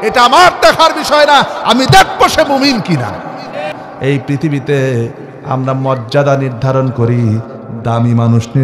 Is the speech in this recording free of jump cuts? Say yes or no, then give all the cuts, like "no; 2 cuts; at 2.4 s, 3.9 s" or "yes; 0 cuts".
no; 1 cut; at 3.9 s